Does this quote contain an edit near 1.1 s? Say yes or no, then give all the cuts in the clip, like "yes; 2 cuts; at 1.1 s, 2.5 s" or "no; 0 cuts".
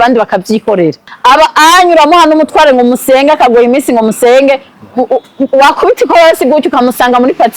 yes; 1 cut; at 1.1 s